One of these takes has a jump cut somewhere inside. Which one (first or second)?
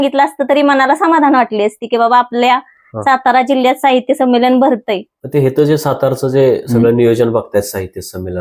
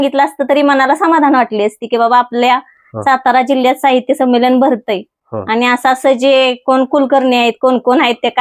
first